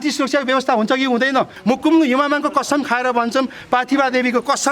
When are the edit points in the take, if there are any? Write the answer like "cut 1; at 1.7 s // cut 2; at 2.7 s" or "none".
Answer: cut 1; at 1.5 s